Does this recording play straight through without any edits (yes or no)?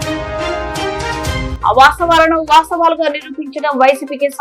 yes